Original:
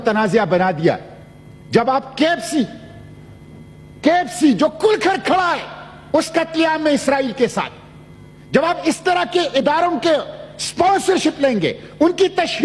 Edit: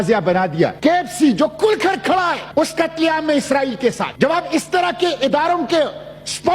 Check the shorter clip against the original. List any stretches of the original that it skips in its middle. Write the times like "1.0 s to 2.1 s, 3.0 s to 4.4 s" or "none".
1.0 s to 4.0 s, 5.6 s to 6.0 s, 7.6 s to 8.4 s